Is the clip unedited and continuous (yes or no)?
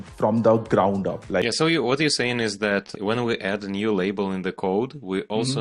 no